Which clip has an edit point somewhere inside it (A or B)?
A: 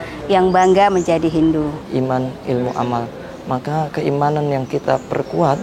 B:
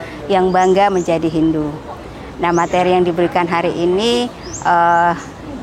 A